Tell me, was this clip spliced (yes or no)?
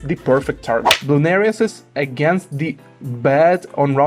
yes